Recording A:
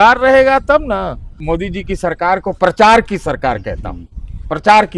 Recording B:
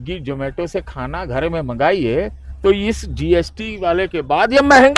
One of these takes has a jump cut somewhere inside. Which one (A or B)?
A